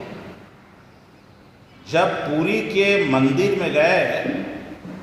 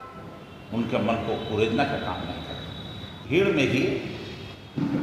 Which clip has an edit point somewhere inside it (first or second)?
second